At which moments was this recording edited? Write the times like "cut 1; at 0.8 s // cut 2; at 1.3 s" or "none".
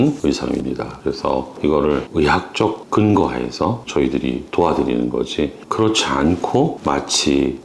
none